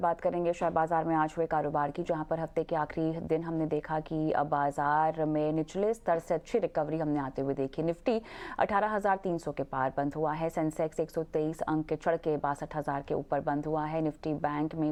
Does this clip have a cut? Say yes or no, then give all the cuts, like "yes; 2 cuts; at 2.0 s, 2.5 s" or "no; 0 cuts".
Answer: no; 0 cuts